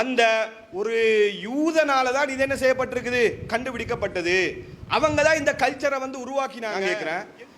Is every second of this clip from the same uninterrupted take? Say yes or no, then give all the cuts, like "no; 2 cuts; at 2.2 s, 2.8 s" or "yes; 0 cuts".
no; 1 cut; at 6.7 s